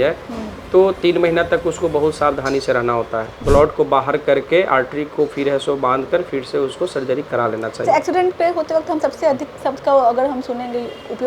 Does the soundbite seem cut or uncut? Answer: cut